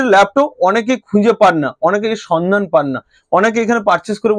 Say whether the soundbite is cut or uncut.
uncut